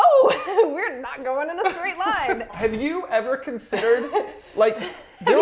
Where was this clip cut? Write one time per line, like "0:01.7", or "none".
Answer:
0:02.5